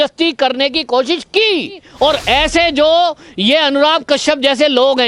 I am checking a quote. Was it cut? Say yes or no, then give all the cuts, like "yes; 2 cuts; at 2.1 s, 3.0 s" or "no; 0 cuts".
yes; 1 cut; at 1.8 s